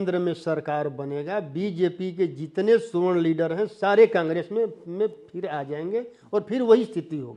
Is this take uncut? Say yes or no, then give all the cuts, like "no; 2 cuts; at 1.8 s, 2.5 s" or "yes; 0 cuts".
yes; 0 cuts